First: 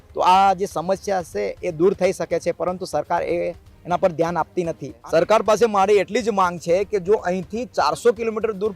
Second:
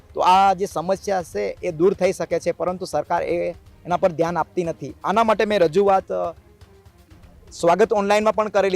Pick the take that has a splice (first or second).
first